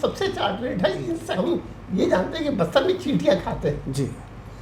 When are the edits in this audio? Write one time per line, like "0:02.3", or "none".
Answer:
0:01.2